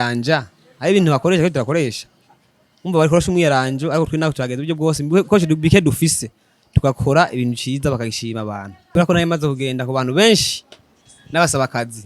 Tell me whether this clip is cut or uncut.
cut